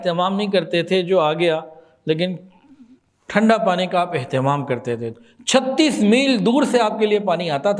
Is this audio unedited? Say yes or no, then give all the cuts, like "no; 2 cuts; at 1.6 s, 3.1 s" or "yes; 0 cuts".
yes; 0 cuts